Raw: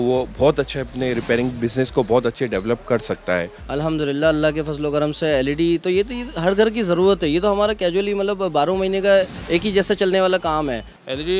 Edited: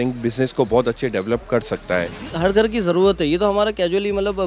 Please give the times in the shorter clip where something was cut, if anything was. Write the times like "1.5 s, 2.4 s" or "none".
2.2 s